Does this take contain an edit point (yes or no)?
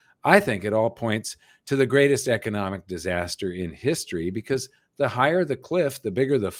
no